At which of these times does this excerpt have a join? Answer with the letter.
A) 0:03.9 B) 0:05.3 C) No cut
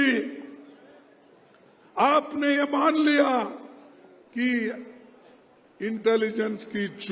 C